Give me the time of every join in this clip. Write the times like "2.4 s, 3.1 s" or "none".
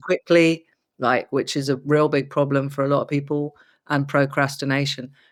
none